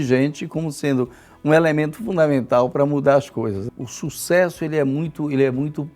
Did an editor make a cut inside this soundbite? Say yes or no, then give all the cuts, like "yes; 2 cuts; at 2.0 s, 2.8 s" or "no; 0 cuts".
yes; 1 cut; at 3.6 s